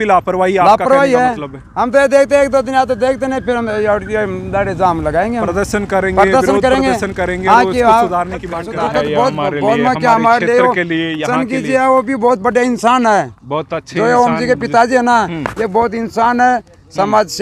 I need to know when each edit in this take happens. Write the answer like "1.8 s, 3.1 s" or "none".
8.6 s